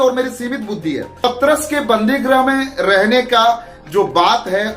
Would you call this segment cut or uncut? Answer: cut